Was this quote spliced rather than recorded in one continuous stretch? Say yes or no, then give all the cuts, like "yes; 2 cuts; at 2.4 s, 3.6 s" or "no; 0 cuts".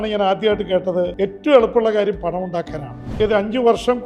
yes; 2 cuts; at 1.1 s, 3.0 s